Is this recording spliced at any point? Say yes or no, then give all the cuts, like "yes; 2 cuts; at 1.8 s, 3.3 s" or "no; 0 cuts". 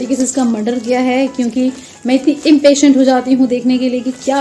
no; 0 cuts